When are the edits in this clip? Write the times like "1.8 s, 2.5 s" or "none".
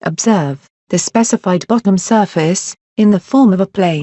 none